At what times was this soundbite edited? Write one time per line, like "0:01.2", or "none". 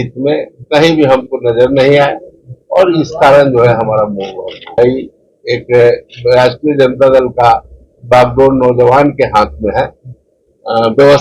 0:04.8

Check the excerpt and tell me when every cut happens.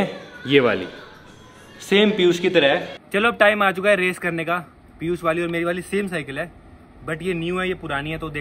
0:03.0

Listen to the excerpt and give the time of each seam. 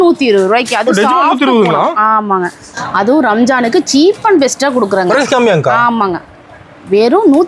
0:02.7

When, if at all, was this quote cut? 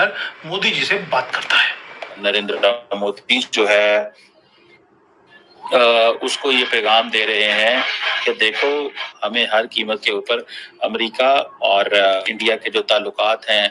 0:02.2
0:09.1
0:12.2

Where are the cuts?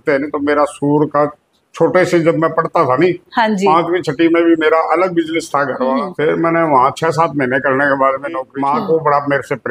0:06.1
0:08.5

